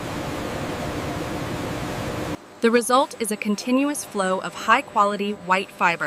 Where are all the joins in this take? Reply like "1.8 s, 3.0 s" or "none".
2.4 s